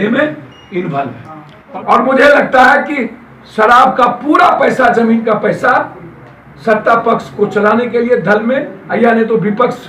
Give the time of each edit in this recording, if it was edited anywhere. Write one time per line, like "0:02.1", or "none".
0:01.7